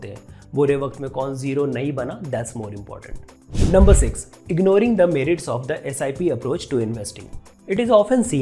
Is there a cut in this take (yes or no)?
no